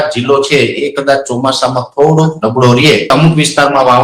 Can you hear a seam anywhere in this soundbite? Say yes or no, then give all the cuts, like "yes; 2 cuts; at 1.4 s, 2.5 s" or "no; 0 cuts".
yes; 1 cut; at 3.1 s